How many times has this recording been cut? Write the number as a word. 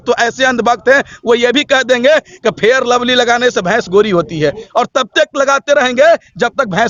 zero